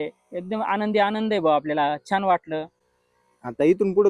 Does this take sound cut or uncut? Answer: uncut